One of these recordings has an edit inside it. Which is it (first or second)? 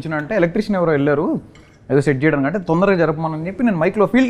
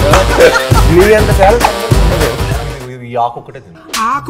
second